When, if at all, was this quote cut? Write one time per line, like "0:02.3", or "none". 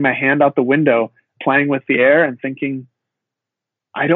0:01.3